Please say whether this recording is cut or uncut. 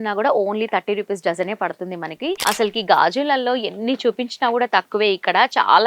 cut